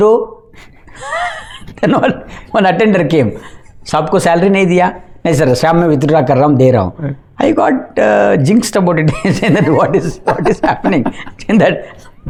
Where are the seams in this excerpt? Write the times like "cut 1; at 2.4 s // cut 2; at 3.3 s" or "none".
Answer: none